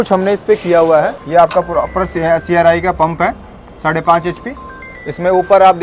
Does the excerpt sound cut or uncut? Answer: cut